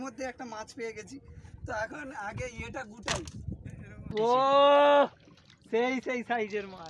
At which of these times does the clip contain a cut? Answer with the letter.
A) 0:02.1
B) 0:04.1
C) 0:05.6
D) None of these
B